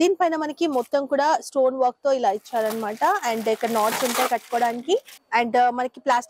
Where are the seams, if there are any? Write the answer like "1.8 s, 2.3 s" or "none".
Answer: 5.2 s